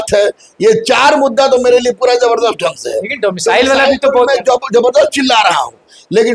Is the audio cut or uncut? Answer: uncut